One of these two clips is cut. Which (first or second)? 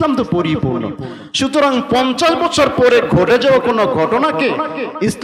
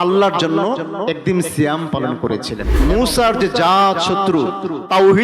second